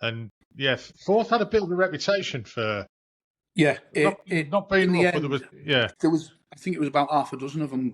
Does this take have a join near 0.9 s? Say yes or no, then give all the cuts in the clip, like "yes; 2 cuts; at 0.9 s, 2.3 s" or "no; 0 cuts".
yes; 2 cuts; at 0.9 s, 5.5 s